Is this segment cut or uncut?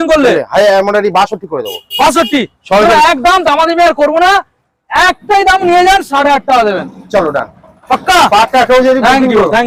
uncut